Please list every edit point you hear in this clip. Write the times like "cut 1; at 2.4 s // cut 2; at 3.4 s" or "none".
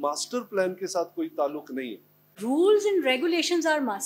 cut 1; at 2.3 s